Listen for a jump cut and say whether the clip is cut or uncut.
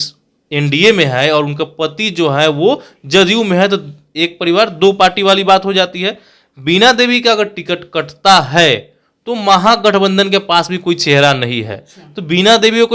uncut